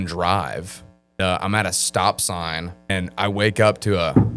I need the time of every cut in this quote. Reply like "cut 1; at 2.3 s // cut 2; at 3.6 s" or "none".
cut 1; at 1.2 s // cut 2; at 2.9 s